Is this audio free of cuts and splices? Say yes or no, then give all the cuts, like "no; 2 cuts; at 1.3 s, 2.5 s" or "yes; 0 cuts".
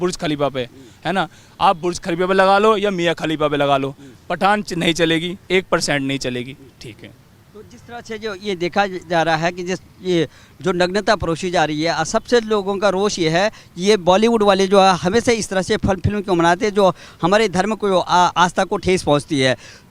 yes; 0 cuts